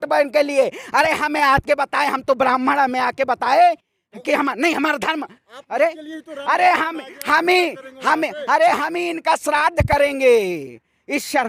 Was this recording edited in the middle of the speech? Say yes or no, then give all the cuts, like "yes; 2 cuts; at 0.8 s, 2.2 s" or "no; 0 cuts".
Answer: no; 0 cuts